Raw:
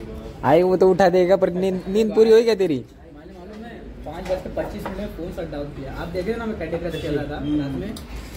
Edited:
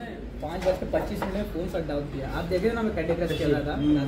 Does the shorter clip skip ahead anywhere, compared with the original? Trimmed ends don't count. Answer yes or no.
no